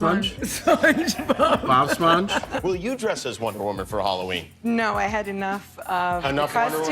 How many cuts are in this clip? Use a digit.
1